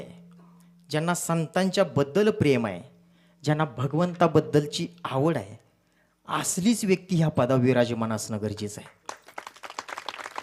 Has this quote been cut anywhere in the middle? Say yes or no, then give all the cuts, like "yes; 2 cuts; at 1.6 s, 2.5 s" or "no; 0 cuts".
no; 0 cuts